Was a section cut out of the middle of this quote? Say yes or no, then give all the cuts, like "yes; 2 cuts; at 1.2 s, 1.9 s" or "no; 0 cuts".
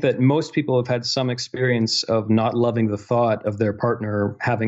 no; 0 cuts